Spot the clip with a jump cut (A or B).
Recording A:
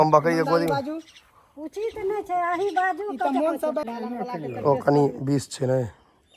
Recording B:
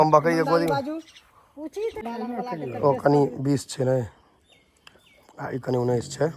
B